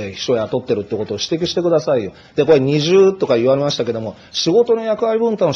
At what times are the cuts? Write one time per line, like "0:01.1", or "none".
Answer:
0:03.3